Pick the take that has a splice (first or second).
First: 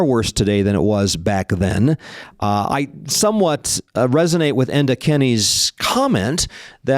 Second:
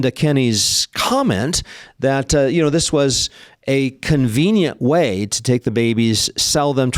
first